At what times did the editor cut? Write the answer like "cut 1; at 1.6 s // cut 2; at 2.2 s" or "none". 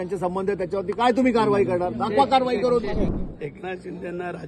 cut 1; at 3.1 s